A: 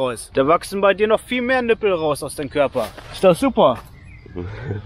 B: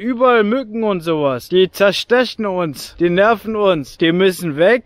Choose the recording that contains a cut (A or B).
B